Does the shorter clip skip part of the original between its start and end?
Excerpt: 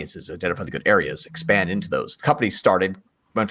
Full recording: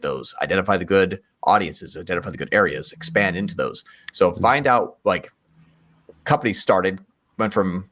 yes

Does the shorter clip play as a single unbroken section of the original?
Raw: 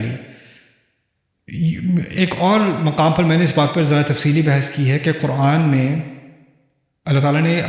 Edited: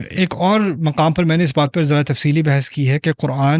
yes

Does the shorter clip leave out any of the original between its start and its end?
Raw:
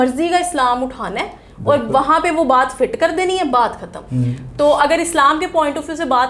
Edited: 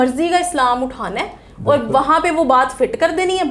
no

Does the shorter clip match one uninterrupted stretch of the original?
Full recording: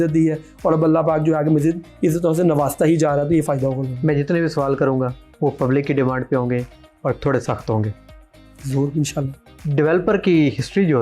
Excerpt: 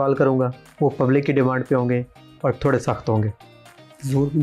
yes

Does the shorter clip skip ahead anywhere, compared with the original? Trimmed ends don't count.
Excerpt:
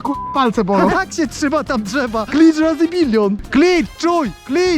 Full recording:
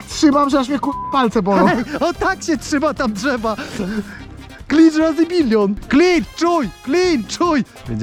yes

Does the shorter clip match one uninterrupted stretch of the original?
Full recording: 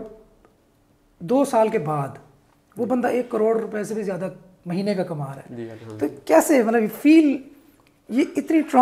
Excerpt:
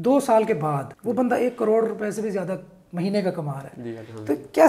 no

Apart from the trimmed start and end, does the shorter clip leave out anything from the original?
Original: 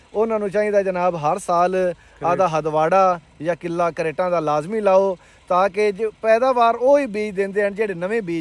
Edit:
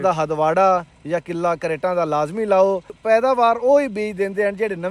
yes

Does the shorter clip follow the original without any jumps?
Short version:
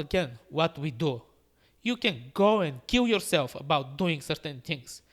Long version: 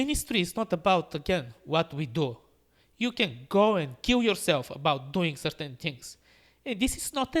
yes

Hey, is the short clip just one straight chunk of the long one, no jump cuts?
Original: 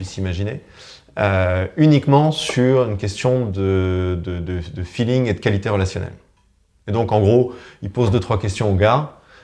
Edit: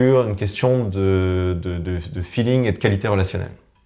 yes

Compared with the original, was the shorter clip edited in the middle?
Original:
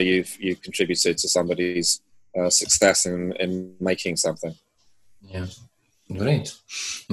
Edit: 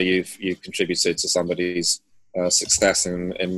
no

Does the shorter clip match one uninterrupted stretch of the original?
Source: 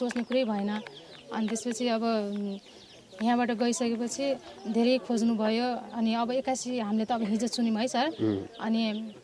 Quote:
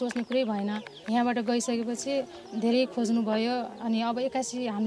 no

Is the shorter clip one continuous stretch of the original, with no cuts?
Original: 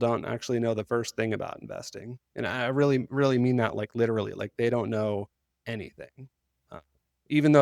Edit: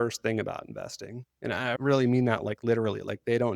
no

